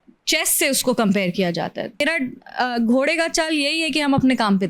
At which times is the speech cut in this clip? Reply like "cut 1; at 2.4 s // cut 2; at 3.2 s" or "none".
cut 1; at 2.0 s